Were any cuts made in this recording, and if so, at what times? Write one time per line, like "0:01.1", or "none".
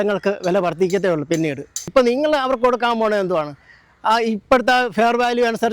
0:01.8